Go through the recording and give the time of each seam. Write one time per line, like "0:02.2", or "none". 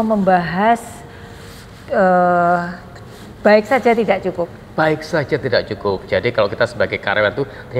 none